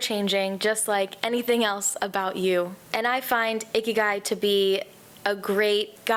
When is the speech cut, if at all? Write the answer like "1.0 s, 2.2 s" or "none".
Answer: none